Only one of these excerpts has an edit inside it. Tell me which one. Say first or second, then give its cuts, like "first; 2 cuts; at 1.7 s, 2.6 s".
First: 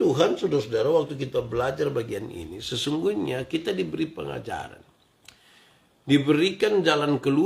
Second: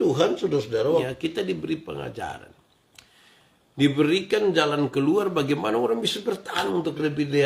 second; 2 cuts; at 1.0 s, 6.6 s